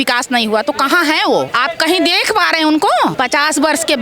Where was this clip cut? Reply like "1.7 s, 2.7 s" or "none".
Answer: 1.5 s, 3.1 s